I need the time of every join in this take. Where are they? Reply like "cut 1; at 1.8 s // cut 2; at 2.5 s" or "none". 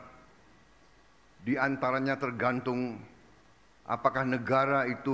none